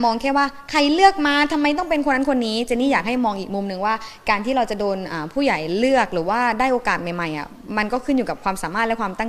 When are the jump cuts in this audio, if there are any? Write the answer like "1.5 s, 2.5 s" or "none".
none